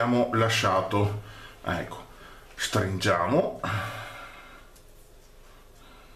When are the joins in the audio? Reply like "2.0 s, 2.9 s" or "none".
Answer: none